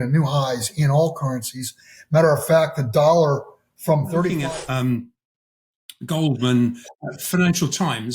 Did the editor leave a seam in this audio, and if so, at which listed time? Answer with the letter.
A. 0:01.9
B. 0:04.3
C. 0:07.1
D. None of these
B